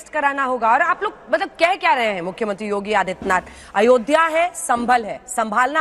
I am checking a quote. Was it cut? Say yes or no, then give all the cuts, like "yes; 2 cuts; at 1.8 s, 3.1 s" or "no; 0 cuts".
no; 0 cuts